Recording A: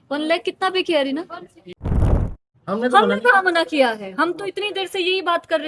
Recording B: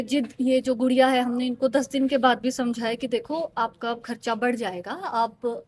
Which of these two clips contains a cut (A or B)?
A